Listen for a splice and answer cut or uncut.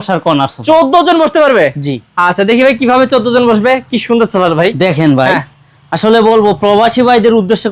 uncut